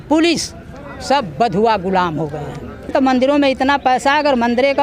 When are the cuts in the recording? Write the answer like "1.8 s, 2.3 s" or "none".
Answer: 2.9 s